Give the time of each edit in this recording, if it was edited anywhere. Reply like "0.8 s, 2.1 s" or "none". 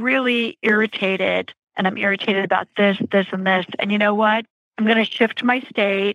1.6 s, 4.6 s